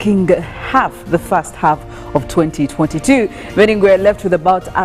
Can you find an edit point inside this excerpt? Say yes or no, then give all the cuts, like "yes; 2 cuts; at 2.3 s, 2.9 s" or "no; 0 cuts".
no; 0 cuts